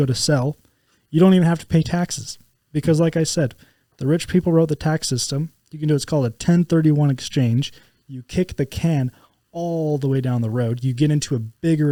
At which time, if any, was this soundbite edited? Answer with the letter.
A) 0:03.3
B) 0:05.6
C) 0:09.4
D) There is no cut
D